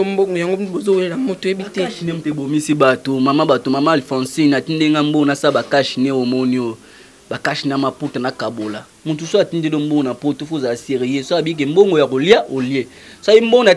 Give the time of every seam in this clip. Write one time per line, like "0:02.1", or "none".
none